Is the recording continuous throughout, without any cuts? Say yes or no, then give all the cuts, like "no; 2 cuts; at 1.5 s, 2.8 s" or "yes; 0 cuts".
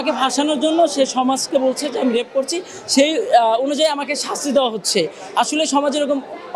yes; 0 cuts